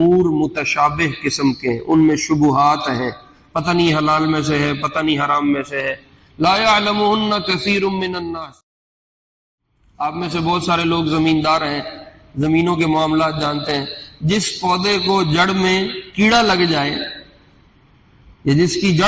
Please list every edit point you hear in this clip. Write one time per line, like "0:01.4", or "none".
0:09.0